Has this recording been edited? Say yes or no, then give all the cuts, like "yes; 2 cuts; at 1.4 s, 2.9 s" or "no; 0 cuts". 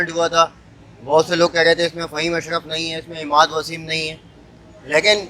no; 0 cuts